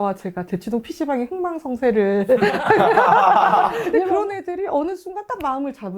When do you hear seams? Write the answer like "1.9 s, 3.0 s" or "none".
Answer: 3.8 s